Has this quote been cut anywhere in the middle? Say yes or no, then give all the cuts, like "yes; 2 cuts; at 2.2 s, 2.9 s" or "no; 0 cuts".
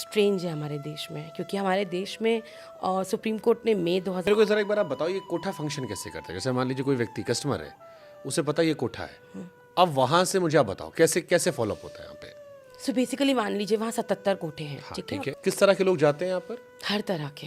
yes; 2 cuts; at 4.3 s, 15.3 s